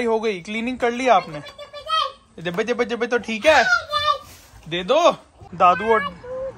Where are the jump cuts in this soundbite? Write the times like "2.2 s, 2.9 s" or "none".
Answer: 5.4 s

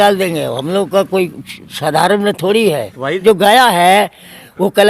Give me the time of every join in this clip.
3.2 s

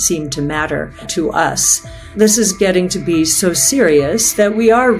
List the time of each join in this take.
1.0 s, 2.1 s

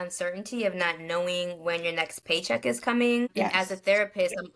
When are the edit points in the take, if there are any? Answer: 3.4 s

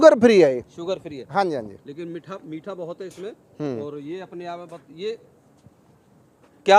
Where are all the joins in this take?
none

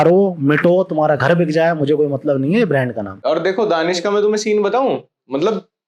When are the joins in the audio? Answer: 3.1 s

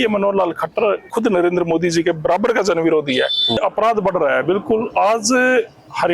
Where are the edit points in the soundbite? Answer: 1.1 s, 3.6 s

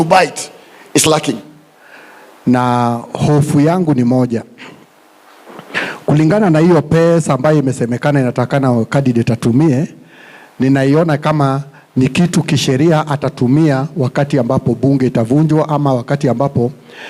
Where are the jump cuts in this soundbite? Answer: 1.5 s

